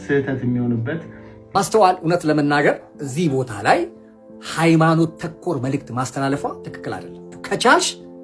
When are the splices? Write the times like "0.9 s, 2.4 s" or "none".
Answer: 1.3 s, 7.3 s